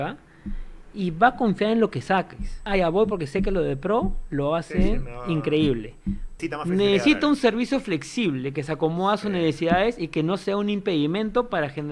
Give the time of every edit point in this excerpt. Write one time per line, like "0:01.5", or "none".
0:02.7
0:06.3